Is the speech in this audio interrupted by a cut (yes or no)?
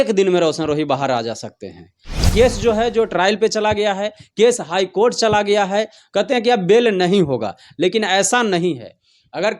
yes